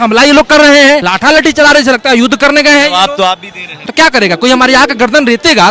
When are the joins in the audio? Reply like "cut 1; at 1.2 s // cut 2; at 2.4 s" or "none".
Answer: cut 1; at 1.1 s // cut 2; at 3.8 s